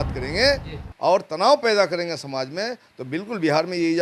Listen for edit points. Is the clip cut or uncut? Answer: uncut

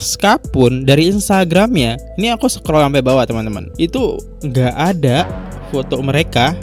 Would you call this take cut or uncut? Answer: uncut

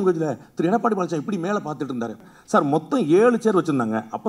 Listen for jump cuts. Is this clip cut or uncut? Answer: cut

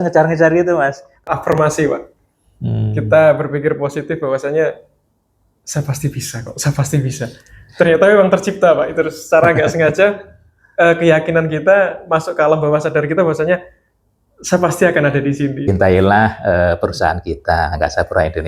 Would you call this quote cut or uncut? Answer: cut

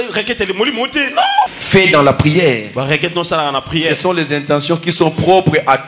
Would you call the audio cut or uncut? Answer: cut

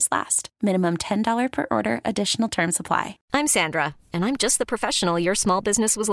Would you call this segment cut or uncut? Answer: cut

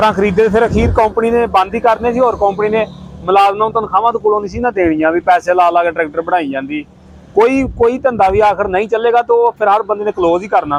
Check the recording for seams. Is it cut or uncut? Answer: uncut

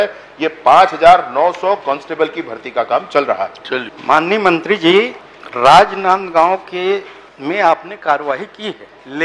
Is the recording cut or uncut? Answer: uncut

